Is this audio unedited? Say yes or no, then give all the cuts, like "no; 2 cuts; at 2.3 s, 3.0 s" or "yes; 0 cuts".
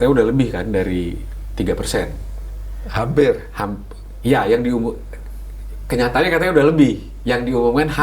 yes; 0 cuts